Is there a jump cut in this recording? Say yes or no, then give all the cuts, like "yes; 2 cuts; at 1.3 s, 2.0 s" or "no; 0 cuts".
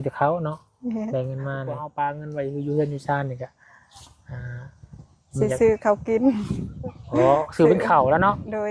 yes; 1 cut; at 1.9 s